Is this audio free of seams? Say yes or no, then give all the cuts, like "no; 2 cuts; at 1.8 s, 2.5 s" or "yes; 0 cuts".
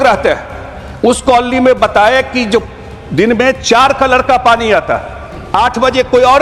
yes; 0 cuts